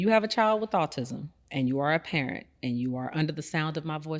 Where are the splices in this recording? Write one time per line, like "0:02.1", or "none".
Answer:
none